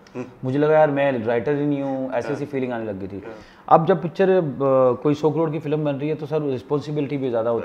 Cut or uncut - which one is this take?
cut